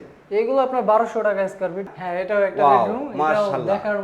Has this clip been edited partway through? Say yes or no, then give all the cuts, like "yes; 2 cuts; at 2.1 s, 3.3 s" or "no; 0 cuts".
yes; 1 cut; at 1.9 s